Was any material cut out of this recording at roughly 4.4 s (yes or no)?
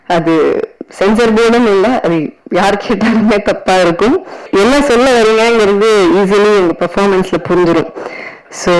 yes